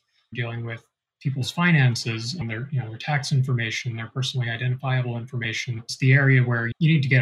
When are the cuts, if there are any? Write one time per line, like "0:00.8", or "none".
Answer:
none